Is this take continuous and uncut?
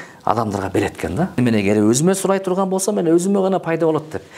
no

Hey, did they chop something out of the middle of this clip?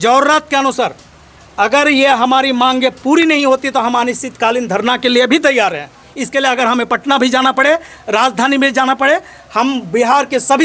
yes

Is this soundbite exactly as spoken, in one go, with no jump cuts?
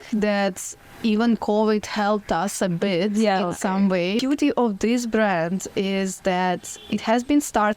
no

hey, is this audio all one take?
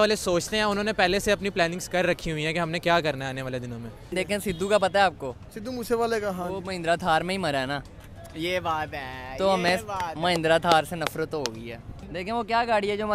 no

